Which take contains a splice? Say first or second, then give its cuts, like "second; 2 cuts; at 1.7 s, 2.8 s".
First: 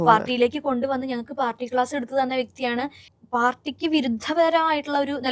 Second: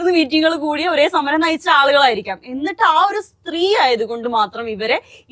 first; 1 cut; at 3.1 s